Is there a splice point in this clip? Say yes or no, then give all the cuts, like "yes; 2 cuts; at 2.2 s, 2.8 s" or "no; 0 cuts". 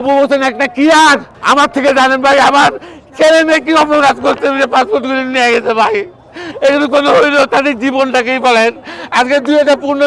yes; 1 cut; at 1.3 s